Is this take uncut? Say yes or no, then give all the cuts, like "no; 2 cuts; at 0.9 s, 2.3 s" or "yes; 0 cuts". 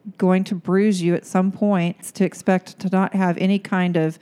no; 1 cut; at 2.1 s